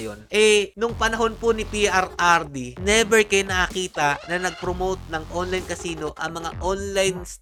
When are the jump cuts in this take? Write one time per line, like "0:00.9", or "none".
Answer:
none